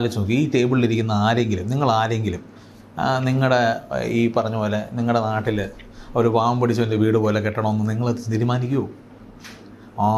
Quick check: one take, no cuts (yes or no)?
yes